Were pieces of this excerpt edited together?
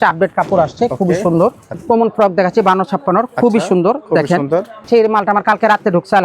yes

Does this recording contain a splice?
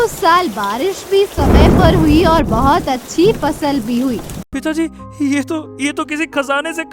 yes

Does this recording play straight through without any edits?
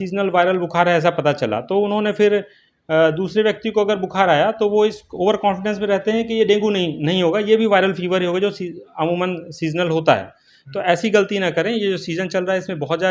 yes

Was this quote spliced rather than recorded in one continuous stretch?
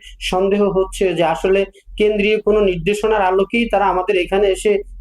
no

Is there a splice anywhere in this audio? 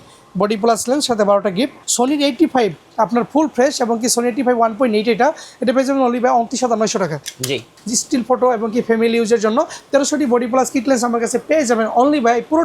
yes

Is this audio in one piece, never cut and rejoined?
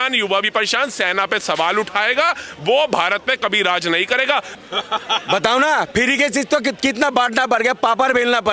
no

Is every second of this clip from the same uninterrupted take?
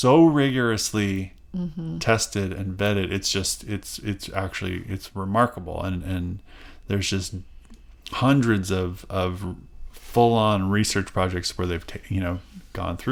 yes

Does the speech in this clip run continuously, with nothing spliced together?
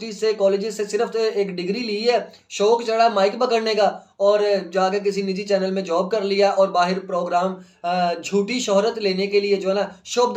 yes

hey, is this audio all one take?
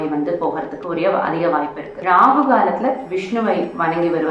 no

